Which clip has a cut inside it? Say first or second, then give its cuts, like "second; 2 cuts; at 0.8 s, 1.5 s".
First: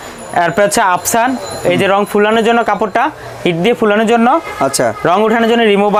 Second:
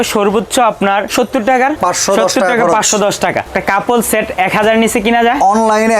second; 3 cuts; at 1.1 s, 1.8 s, 3.5 s